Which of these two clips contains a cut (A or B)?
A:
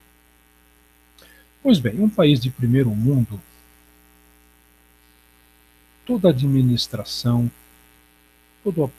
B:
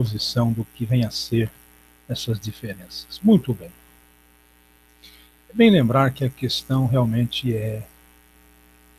A